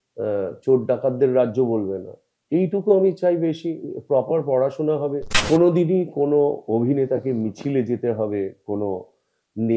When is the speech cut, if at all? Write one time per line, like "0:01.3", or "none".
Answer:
0:05.3